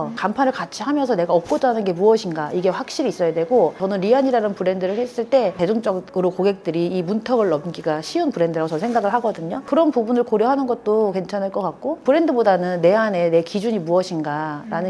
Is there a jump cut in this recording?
no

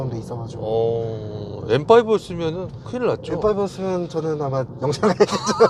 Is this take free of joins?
yes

